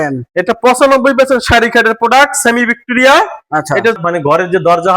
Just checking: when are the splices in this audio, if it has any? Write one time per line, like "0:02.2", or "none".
0:04.0